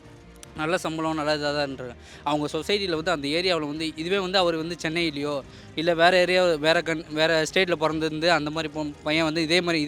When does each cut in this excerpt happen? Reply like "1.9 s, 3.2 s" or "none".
none